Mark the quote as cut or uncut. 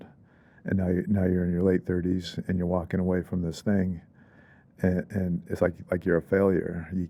uncut